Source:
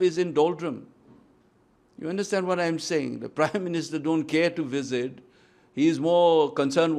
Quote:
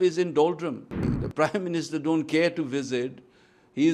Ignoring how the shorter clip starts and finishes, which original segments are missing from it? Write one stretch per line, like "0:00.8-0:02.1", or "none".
0:01.0-0:03.0